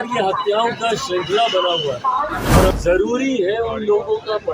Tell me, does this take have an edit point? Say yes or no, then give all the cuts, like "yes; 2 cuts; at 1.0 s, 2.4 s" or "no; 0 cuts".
yes; 1 cut; at 2.7 s